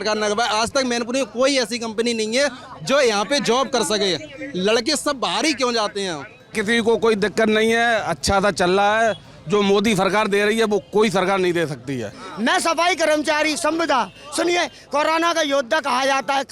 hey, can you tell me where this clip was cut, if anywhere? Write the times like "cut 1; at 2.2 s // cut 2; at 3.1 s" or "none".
cut 1; at 6.6 s // cut 2; at 12.2 s